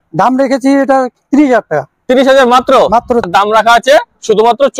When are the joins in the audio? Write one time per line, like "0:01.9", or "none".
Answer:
0:03.3